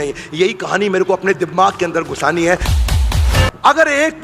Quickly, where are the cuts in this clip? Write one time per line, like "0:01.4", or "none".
0:03.0